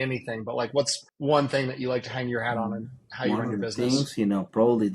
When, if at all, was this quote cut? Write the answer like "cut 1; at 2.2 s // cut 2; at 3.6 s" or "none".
cut 1; at 1.0 s